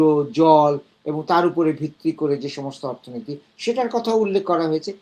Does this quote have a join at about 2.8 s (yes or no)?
no